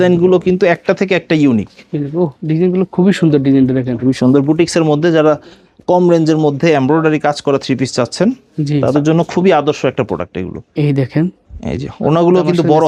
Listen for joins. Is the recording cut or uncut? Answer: uncut